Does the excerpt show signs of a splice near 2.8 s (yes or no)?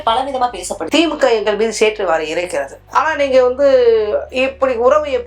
yes